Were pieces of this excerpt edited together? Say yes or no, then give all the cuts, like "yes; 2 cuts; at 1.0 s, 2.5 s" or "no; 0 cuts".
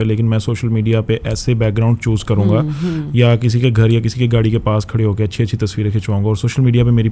no; 0 cuts